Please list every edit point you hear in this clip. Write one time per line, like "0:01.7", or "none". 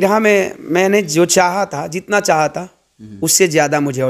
none